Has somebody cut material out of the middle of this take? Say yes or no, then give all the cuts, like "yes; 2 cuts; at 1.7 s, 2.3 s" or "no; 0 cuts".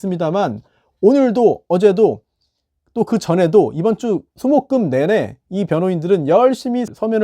no; 0 cuts